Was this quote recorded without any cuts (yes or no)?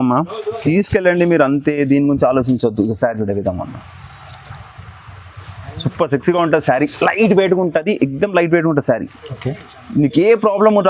yes